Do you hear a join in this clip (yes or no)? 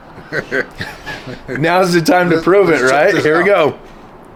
no